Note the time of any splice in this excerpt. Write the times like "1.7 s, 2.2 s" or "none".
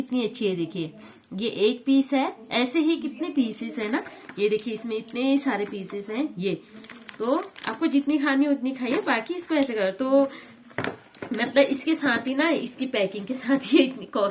none